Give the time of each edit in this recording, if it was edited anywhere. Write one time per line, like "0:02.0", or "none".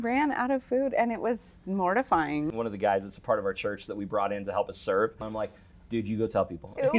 0:02.5
0:05.2